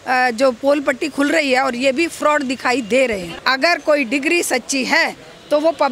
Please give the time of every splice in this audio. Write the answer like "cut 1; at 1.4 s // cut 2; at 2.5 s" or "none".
cut 1; at 3.4 s